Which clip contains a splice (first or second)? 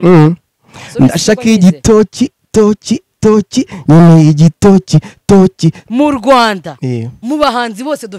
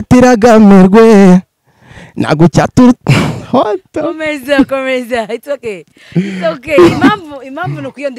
first